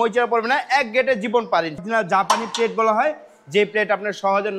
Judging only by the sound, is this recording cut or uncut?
cut